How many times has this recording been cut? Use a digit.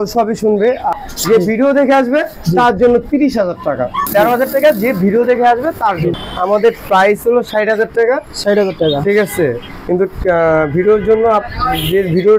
3